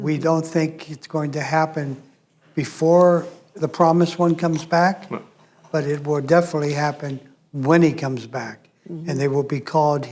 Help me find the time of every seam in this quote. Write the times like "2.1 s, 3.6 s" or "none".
none